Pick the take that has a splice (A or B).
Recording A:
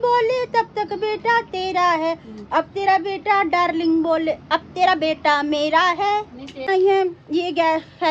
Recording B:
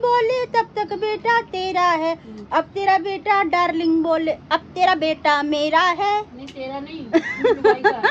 A